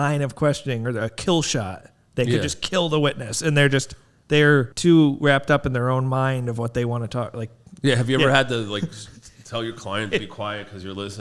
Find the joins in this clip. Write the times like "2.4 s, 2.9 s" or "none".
4.7 s